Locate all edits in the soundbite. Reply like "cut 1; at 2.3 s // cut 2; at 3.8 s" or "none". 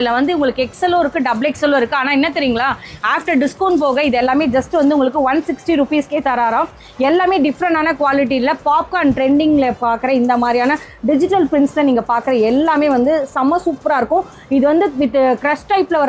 none